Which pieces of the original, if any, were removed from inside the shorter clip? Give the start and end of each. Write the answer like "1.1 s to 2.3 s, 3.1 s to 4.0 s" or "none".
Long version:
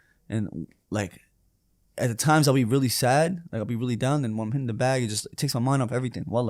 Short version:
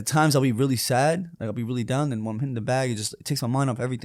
none